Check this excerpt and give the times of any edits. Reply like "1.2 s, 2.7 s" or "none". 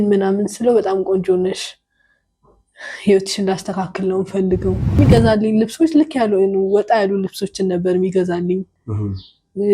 5.0 s